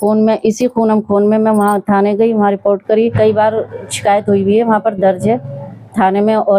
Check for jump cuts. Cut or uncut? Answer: cut